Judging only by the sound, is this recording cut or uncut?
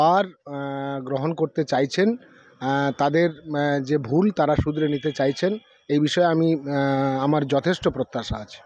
uncut